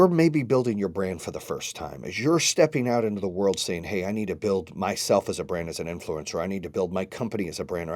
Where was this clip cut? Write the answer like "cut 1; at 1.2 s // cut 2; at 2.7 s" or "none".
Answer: none